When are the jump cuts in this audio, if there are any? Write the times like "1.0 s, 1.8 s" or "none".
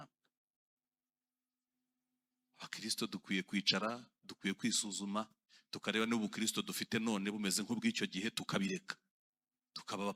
none